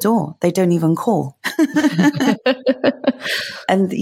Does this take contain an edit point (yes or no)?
no